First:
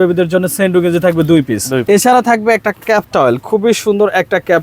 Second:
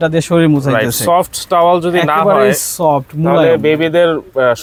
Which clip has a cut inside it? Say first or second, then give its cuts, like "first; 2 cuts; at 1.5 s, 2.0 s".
first; 1 cut; at 1.8 s